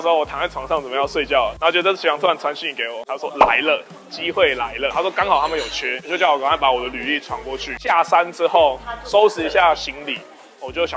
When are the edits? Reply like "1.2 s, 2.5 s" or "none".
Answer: none